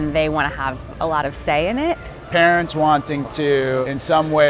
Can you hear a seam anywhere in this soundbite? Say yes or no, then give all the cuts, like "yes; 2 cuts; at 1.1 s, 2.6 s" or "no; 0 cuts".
yes; 1 cut; at 2.1 s